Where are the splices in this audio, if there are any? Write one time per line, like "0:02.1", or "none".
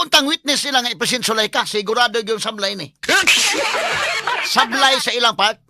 0:04.1